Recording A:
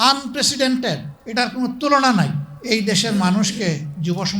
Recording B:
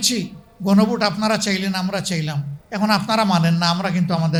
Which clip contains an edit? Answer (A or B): A